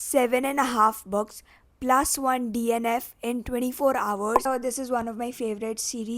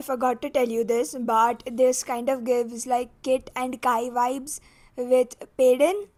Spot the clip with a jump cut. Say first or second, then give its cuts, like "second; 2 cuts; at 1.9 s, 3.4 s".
first; 1 cut; at 4.4 s